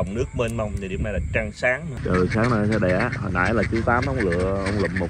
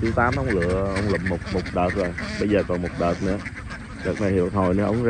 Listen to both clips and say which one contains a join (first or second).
first